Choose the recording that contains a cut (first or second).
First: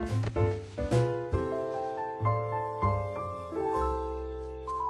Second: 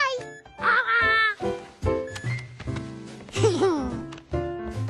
second